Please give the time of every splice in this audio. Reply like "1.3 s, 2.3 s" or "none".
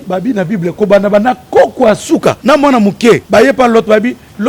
2.4 s, 3.2 s